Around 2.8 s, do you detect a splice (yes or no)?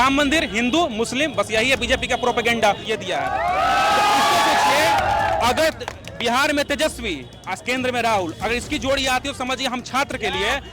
yes